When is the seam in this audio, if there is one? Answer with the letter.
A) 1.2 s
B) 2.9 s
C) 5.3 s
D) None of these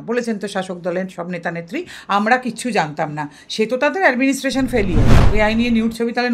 C